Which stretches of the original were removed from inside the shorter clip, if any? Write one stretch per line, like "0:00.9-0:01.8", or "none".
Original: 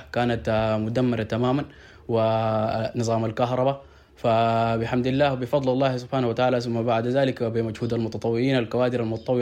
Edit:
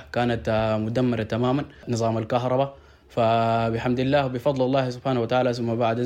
0:01.8-0:02.9